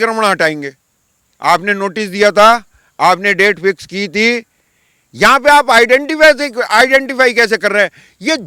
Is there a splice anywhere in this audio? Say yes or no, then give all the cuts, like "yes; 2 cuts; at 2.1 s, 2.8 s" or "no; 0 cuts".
no; 0 cuts